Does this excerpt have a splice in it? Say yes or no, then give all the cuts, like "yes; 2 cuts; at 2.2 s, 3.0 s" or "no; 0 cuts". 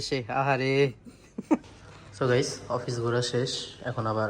yes; 1 cut; at 1.6 s